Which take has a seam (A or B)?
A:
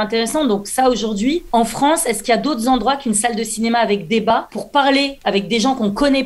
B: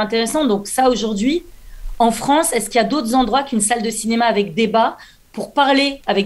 A